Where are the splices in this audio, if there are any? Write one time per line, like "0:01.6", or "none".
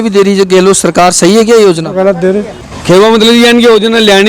0:02.7